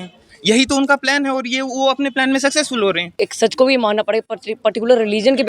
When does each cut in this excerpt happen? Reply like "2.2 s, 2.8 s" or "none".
3.1 s